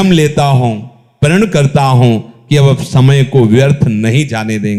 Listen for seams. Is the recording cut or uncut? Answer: uncut